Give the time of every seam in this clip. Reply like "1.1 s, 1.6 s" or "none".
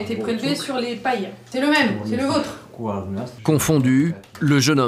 1.4 s, 3.3 s